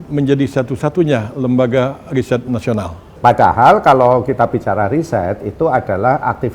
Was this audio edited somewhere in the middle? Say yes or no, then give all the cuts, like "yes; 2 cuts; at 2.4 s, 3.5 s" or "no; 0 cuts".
yes; 1 cut; at 3.1 s